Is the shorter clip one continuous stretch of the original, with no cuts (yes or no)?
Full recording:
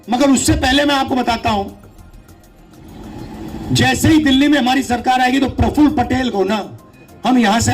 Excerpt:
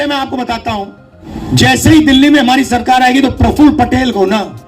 no